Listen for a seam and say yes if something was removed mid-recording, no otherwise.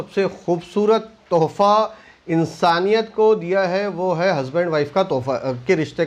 no